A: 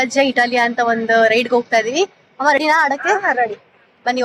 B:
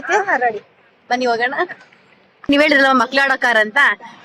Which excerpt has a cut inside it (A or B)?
B